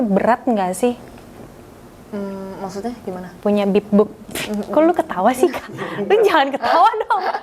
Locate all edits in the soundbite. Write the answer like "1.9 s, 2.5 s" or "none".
none